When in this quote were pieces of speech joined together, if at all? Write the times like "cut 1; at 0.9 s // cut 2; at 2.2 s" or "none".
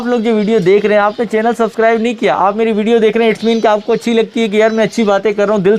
none

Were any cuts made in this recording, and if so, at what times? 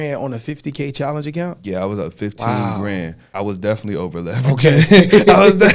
cut 1; at 3.2 s

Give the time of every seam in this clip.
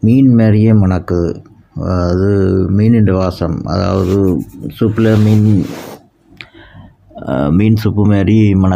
none

